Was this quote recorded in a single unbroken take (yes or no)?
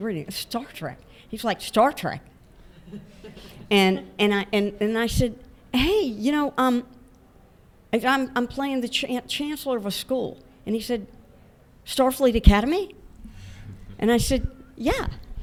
yes